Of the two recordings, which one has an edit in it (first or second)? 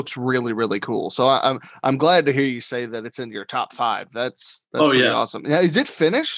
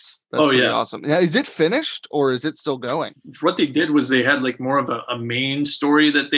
second